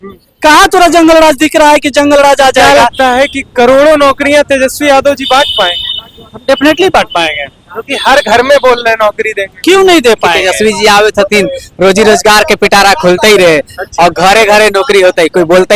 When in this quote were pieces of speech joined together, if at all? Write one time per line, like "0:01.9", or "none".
0:02.6
0:10.3